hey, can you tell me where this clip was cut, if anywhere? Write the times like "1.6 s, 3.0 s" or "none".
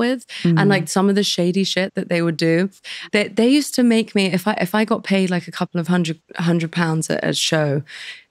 none